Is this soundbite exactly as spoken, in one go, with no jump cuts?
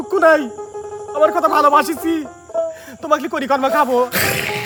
yes; 0 cuts

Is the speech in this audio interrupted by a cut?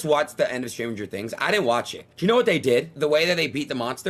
no; 0 cuts

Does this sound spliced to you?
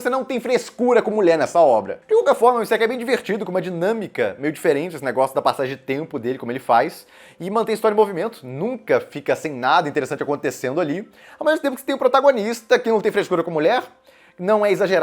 no; 0 cuts

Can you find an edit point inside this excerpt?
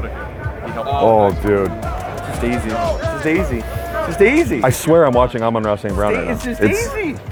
no; 0 cuts

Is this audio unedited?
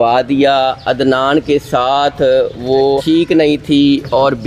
no; 1 cut; at 3.0 s

